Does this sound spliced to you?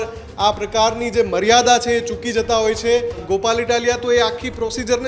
yes; 1 cut; at 3.2 s

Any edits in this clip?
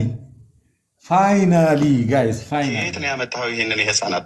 yes; 1 cut; at 3.0 s

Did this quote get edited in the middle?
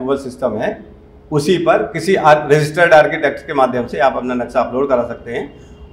no; 0 cuts

